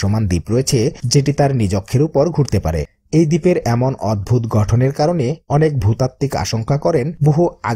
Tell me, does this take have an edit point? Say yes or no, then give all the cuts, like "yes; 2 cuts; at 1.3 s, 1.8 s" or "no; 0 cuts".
yes; 1 cut; at 2.9 s